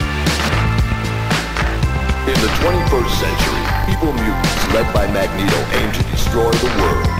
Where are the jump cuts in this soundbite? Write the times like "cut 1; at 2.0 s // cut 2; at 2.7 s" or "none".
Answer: none